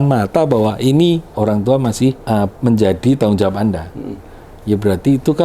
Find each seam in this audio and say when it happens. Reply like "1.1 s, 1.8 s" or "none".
1.3 s, 2.2 s